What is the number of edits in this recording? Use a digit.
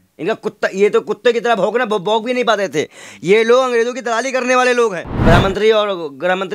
1